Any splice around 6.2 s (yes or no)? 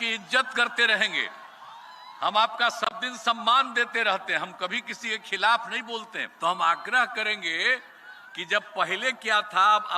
yes